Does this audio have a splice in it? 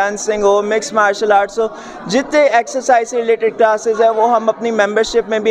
no; 0 cuts

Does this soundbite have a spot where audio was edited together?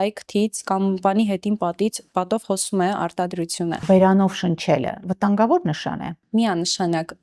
yes; 2 cuts; at 3.8 s, 6.1 s

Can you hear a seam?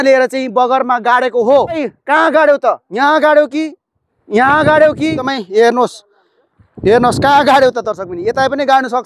yes; 2 cuts; at 1.9 s, 5.3 s

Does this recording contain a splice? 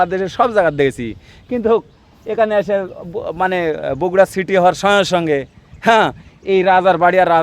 no; 0 cuts

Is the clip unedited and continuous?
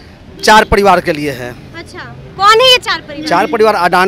yes; 0 cuts

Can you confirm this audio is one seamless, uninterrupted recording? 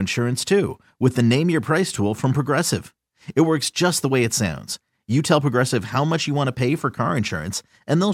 yes; 0 cuts

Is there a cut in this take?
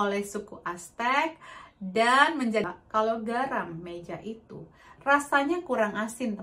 yes; 1 cut; at 2.6 s

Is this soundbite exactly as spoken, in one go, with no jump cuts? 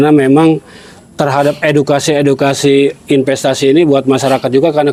yes; 0 cuts

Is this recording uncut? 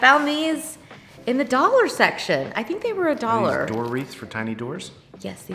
yes; 0 cuts

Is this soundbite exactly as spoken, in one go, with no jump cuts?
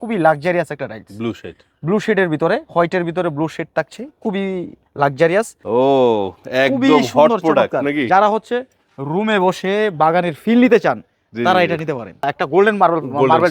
no; 2 cuts; at 5.6 s, 12.3 s

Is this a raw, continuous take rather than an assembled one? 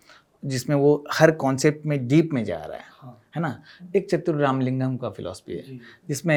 yes; 0 cuts

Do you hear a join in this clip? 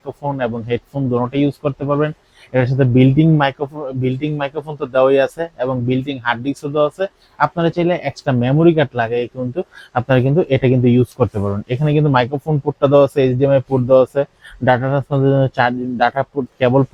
no; 0 cuts

